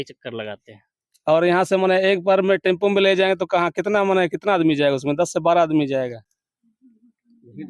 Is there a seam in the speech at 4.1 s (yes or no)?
no